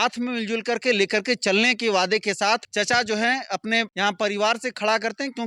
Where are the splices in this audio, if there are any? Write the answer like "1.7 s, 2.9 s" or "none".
2.7 s, 3.9 s